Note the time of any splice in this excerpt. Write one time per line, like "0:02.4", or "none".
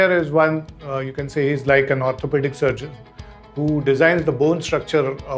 none